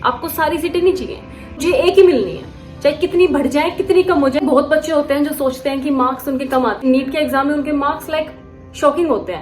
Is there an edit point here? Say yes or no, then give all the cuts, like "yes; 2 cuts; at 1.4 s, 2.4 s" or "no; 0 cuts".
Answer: yes; 3 cuts; at 1.6 s, 4.4 s, 6.8 s